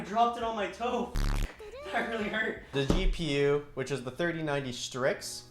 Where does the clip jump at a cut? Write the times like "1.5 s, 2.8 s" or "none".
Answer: 2.7 s

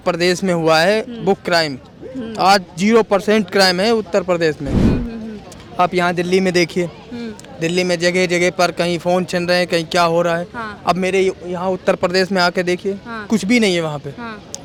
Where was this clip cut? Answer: none

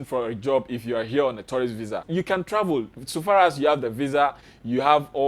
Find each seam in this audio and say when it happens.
2.1 s

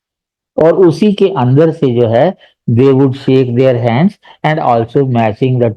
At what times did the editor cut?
none

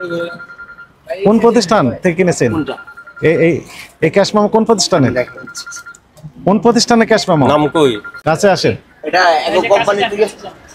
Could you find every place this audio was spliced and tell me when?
none

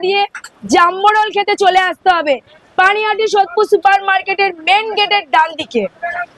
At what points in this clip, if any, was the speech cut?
none

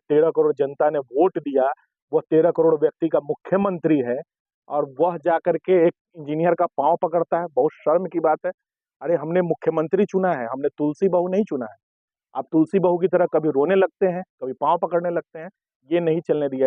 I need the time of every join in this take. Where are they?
none

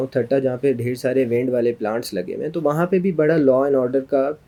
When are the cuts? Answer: none

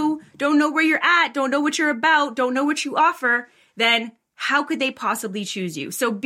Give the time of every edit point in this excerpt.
none

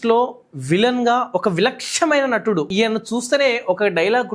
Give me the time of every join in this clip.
2.7 s

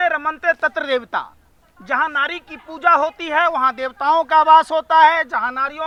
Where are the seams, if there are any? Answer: none

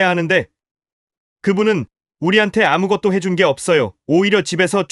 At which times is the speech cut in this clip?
none

